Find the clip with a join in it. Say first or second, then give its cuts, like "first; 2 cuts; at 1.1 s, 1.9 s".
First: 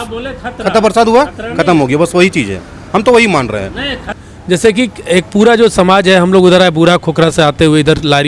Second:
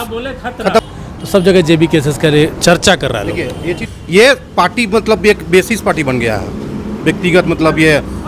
second; 2 cuts; at 0.8 s, 3.9 s